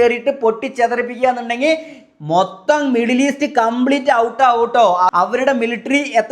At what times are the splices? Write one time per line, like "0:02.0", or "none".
0:05.1